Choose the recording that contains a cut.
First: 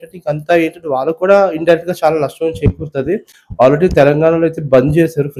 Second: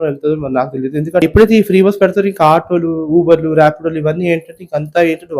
second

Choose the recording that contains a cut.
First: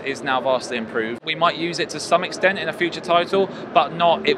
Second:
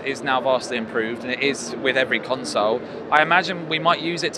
first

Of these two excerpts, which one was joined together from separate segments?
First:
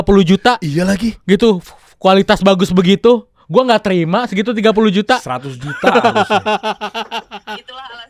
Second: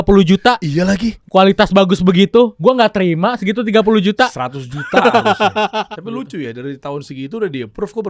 second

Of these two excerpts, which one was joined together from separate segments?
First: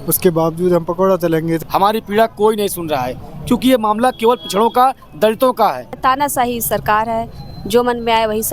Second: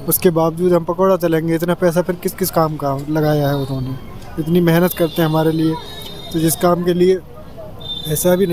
first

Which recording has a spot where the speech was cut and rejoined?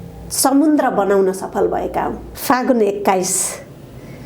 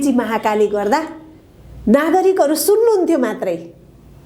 first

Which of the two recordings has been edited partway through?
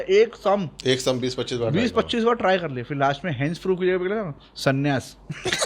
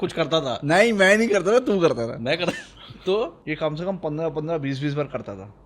second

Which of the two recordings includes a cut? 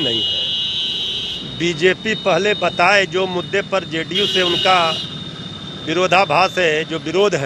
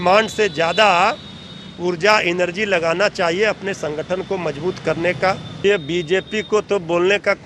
second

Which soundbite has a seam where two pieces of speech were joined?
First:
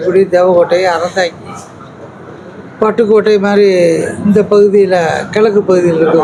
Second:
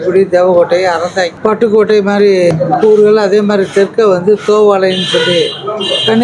second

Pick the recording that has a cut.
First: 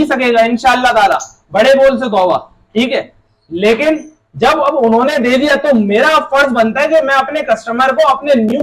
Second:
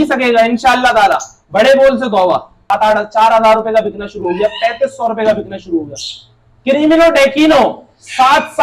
second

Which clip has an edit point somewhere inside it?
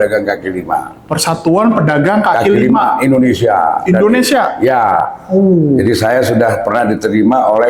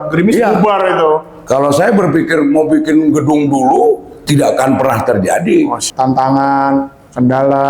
second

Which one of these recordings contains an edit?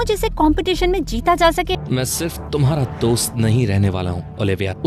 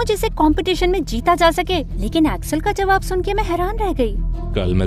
first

